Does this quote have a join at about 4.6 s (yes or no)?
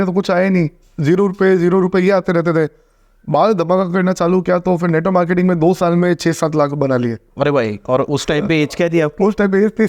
no